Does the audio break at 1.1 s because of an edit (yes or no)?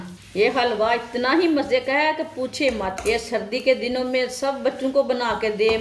no